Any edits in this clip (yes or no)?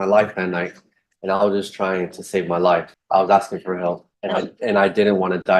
yes